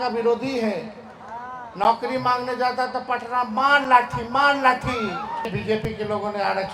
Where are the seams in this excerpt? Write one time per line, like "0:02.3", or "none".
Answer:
0:05.5

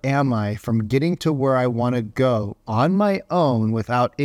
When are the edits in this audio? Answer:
none

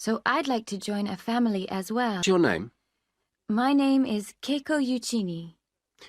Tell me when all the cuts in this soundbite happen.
0:02.2

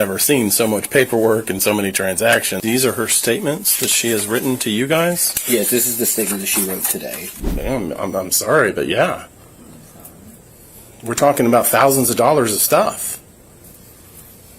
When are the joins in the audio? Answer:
0:02.5
0:07.3

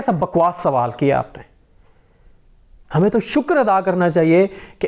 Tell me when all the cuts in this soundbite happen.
none

